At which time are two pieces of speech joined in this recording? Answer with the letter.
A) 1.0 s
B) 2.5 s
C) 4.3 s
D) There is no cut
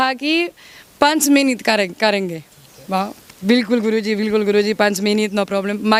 D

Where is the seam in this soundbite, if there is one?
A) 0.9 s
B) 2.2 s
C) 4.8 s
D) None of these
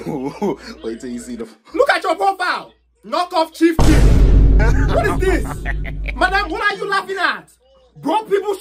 D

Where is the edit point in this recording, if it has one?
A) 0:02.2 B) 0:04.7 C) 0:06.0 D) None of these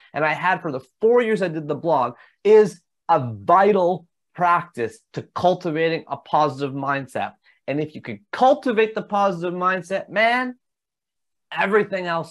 A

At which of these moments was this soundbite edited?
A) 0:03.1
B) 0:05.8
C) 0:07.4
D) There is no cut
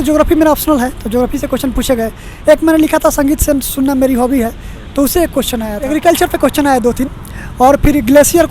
B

